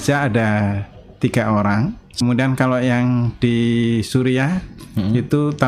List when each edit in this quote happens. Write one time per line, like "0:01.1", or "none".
0:02.1

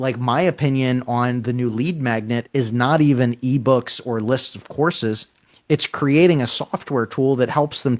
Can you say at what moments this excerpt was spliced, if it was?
none

